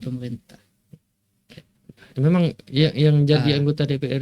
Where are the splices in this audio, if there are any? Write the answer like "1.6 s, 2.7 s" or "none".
none